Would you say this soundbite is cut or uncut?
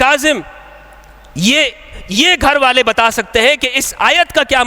uncut